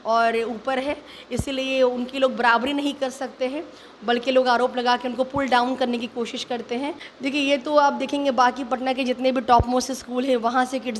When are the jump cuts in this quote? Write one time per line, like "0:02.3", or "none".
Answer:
0:07.1